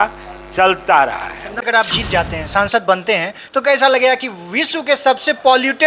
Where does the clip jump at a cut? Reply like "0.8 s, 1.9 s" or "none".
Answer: 1.7 s

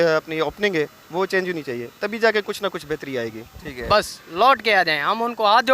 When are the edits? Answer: 3.7 s

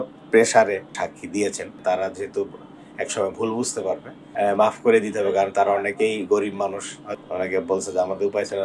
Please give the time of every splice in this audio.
1.0 s, 1.7 s, 4.2 s, 7.1 s

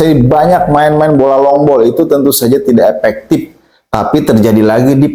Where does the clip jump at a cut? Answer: none

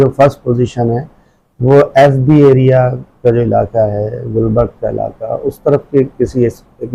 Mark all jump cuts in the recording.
none

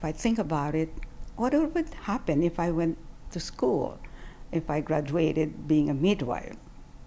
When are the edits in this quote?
none

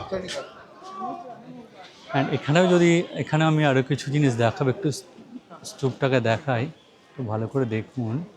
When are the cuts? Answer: none

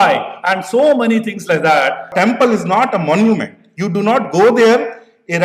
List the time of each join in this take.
2.1 s

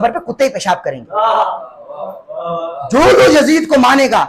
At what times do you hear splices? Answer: none

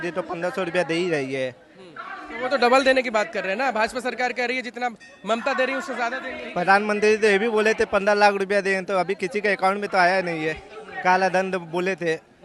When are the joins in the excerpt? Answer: 6.4 s

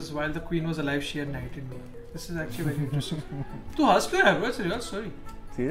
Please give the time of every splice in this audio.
none

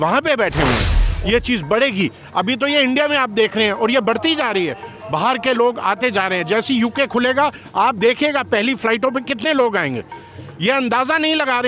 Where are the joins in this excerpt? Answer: 1.1 s

